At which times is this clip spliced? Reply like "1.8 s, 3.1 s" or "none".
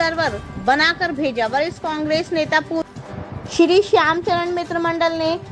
2.9 s